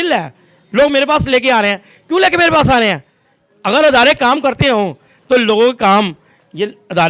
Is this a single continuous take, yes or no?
yes